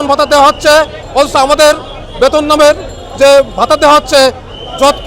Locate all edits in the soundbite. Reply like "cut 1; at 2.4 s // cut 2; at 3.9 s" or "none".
none